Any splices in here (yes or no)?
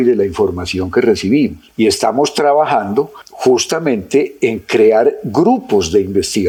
no